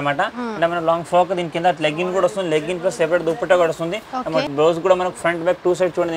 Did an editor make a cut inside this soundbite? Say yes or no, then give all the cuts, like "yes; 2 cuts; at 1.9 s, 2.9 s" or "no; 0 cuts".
yes; 1 cut; at 4.5 s